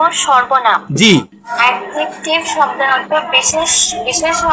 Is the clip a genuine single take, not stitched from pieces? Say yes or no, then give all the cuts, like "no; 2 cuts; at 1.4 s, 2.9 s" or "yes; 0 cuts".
no; 1 cut; at 1.4 s